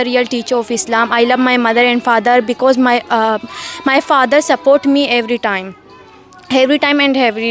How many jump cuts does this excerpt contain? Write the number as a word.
zero